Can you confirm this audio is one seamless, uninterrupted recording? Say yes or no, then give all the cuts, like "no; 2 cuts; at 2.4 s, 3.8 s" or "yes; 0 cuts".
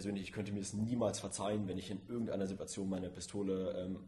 yes; 0 cuts